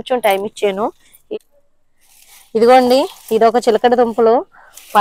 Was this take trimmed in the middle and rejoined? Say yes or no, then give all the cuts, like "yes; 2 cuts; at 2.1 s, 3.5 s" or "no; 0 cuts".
yes; 1 cut; at 1.1 s